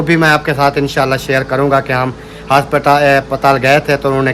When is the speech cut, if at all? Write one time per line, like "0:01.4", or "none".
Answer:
none